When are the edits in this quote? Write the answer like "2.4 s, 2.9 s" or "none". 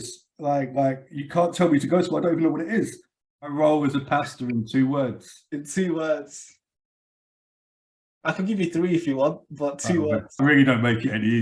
3.5 s, 10.4 s